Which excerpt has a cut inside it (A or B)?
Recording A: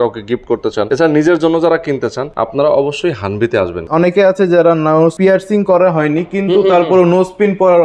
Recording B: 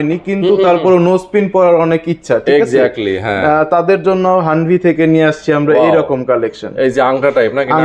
A